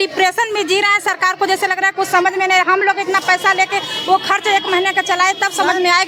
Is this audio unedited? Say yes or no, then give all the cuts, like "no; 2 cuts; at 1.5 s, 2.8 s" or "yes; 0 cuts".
yes; 0 cuts